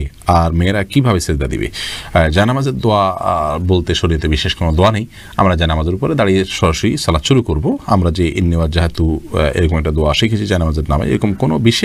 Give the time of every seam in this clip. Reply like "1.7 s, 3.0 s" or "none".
none